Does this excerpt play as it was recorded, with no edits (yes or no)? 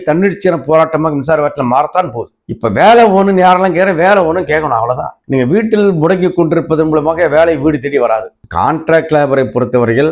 no